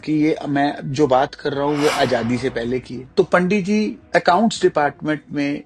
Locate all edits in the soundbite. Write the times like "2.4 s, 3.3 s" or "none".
3.0 s, 4.0 s